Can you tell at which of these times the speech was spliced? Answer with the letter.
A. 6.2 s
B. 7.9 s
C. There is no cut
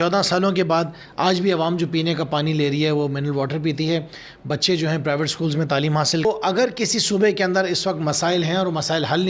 A